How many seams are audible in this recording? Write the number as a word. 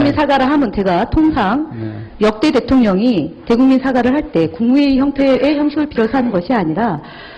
one